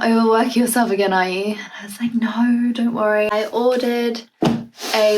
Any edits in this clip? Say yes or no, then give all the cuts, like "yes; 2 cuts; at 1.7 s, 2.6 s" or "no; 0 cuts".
yes; 1 cut; at 3.3 s